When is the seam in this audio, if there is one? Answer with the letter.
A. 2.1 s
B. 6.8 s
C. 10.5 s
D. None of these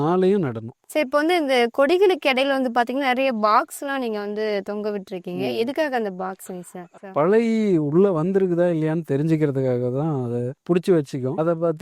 B